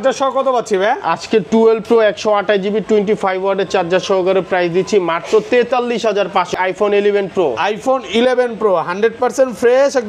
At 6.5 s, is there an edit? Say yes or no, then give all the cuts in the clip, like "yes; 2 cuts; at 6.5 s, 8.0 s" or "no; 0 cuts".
yes; 1 cut; at 6.5 s